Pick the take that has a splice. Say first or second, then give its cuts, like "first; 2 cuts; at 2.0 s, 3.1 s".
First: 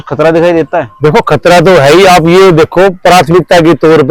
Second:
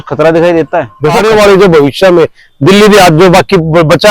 second; 1 cut; at 1.2 s